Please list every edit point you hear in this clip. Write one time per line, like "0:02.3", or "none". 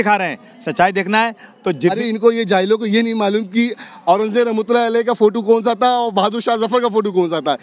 0:02.0